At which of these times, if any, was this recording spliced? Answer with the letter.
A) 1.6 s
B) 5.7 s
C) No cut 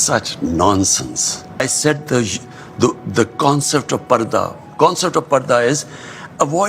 A